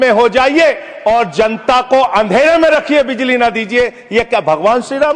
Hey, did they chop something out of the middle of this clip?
no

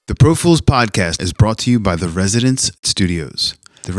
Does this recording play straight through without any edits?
no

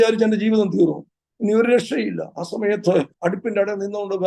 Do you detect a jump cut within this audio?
yes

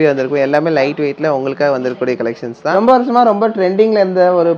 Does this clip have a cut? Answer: yes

